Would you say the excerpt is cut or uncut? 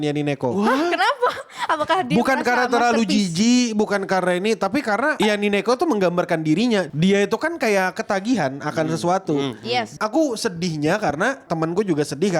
cut